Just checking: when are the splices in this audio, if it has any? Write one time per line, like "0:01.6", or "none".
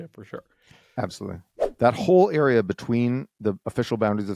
0:01.5